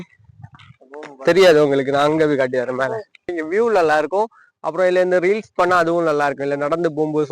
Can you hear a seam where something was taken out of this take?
yes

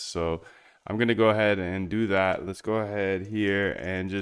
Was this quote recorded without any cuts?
yes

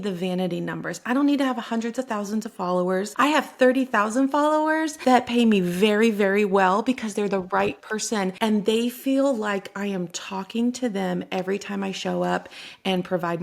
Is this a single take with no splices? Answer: no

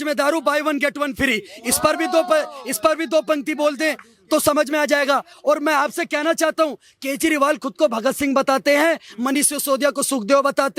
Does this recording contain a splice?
no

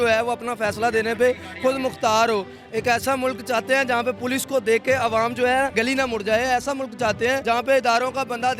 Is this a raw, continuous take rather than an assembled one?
no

